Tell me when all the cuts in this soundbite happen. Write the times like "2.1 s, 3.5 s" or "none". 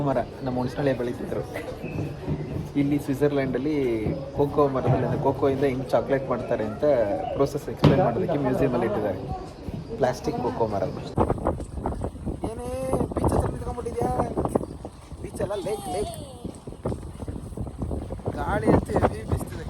11.1 s